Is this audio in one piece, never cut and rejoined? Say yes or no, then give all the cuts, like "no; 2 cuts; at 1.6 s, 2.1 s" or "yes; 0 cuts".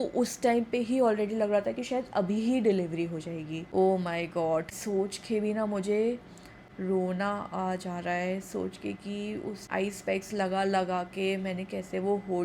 no; 3 cuts; at 3.7 s, 4.7 s, 9.6 s